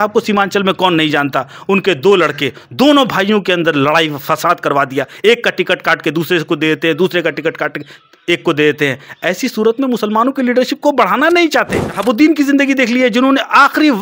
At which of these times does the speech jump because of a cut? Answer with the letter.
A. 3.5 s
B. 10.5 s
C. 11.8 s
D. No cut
C